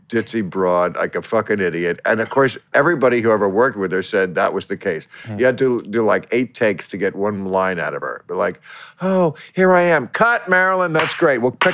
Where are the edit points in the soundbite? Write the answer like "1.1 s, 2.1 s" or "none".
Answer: none